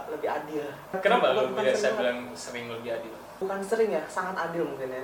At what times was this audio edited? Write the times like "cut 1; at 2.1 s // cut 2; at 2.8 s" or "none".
none